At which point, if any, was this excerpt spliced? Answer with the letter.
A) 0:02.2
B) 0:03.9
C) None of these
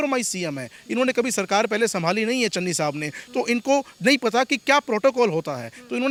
C